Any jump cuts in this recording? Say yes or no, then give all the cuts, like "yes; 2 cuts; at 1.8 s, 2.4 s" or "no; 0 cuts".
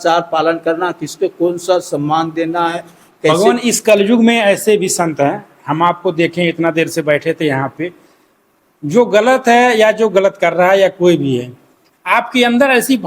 yes; 1 cut; at 3.3 s